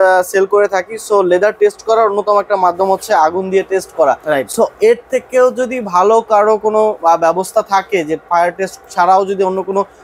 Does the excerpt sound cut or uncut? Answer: uncut